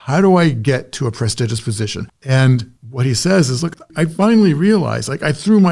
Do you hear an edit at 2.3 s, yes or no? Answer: yes